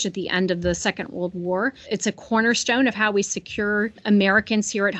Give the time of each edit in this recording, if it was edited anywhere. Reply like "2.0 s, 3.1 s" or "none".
1.9 s, 4.0 s

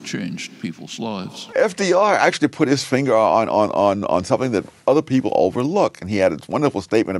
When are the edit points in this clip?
1.5 s

